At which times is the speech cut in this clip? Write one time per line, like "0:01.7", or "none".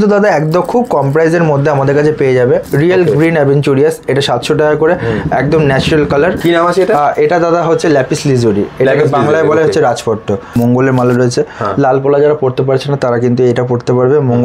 0:02.6
0:06.4
0:10.5